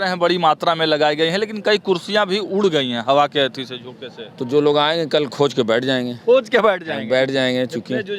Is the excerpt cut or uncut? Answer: uncut